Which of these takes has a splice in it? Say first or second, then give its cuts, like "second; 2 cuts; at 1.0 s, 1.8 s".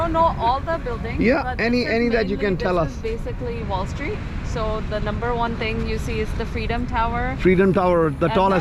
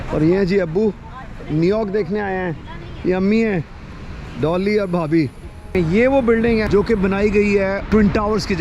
second; 3 cuts; at 5.7 s, 6.7 s, 7.8 s